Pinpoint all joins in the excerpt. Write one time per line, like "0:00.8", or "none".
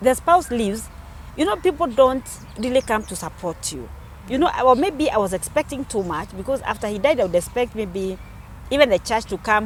none